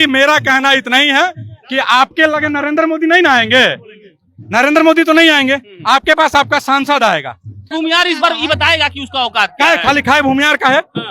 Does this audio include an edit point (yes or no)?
yes